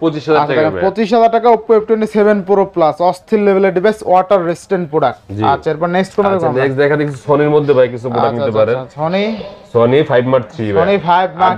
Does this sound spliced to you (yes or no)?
no